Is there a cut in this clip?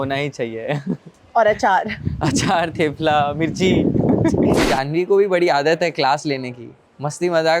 yes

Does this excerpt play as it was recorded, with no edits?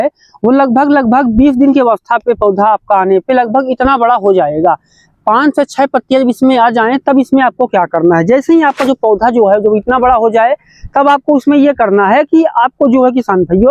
yes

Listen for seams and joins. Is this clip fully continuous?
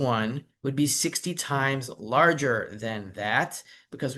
yes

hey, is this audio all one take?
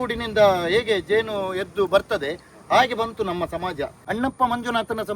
no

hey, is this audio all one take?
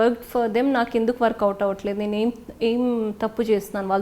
yes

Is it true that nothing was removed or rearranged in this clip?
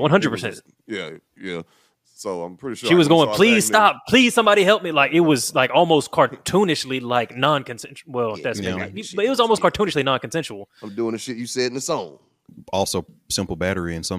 yes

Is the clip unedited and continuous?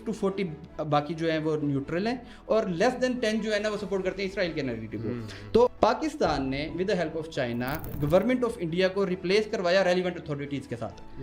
no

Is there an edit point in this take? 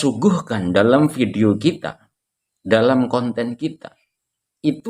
no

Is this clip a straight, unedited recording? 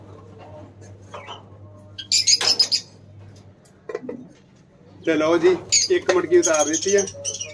yes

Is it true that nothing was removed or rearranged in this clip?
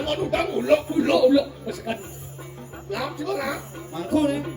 yes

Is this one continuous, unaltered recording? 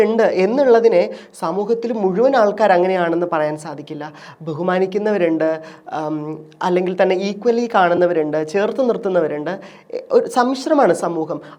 yes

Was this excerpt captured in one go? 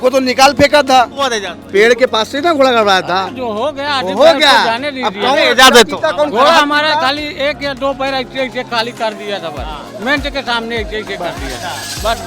no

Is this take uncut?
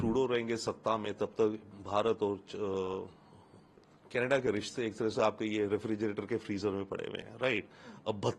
yes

